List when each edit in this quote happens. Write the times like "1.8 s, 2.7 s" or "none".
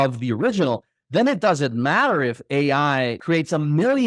3.2 s